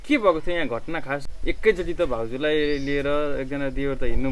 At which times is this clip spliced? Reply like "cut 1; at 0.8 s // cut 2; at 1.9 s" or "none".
cut 1; at 1.3 s